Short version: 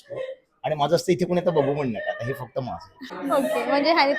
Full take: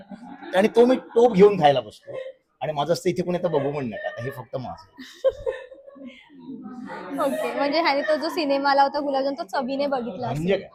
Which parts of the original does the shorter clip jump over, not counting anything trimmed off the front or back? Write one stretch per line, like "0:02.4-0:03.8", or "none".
0:05.1-0:07.0